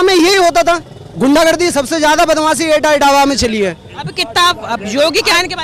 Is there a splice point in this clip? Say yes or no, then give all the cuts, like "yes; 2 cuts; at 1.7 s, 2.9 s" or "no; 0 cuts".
no; 0 cuts